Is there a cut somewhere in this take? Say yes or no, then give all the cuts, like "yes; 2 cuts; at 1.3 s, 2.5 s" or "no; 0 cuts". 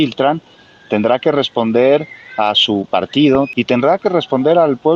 yes; 1 cut; at 3.5 s